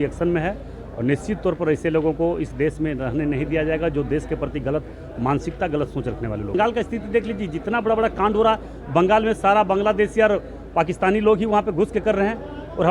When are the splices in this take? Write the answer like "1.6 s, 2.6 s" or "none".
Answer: 6.5 s